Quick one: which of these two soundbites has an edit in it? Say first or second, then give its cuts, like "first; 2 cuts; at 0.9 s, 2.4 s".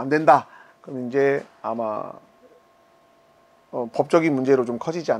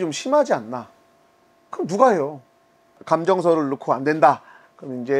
second; 1 cut; at 3.0 s